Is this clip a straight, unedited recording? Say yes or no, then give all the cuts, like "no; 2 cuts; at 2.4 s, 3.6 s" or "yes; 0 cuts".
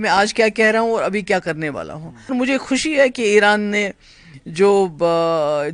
no; 1 cut; at 2.3 s